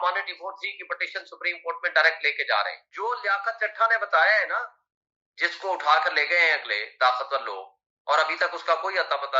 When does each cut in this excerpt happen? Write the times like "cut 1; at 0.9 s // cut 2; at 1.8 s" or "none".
cut 1; at 2.8 s

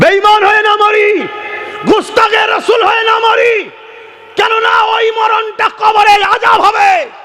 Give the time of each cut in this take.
none

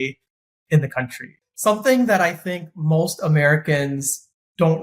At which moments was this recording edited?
cut 1; at 1.5 s

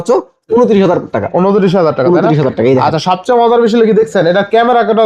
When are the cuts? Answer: none

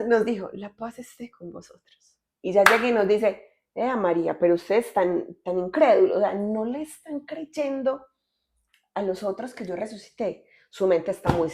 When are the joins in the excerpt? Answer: none

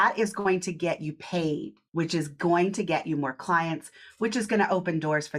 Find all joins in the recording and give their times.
cut 1; at 1.8 s

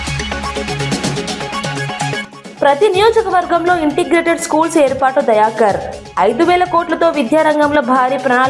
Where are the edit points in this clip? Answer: cut 1; at 2.2 s

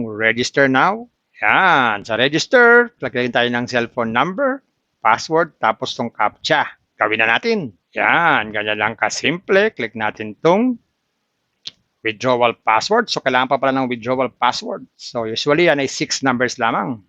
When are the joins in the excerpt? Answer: none

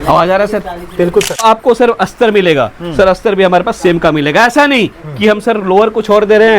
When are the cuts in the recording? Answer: cut 1; at 1.4 s

